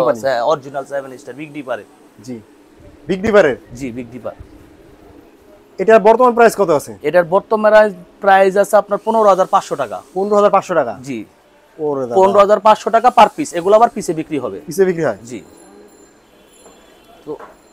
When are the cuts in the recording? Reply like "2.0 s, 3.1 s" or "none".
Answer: none